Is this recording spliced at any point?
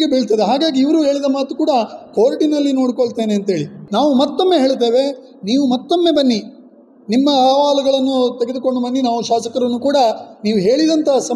yes; 1 cut; at 3.8 s

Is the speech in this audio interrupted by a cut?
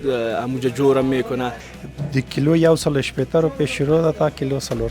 yes; 1 cut; at 1.6 s

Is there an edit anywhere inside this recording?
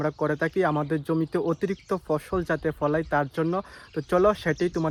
no; 0 cuts

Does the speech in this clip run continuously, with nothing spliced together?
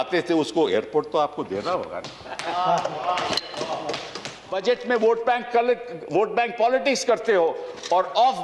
no; 1 cut; at 4.5 s

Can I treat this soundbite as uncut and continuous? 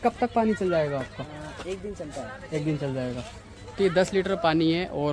yes; 0 cuts

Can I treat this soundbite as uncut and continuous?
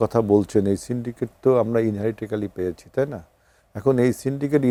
yes; 0 cuts

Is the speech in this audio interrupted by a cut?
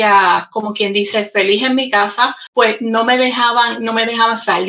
yes; 1 cut; at 2.4 s

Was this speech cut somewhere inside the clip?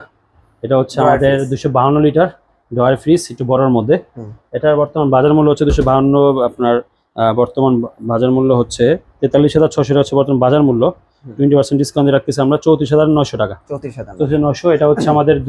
no; 0 cuts

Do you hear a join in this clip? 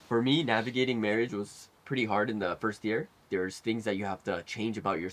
yes; 1 cut; at 3.2 s

